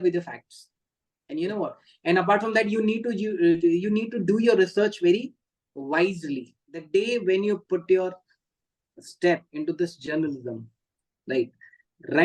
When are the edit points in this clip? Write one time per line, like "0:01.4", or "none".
0:06.9